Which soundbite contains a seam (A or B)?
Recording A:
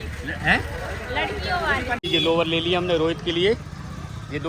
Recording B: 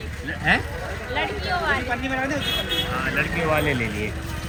A